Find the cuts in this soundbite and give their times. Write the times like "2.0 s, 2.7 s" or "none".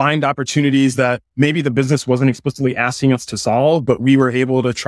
1.2 s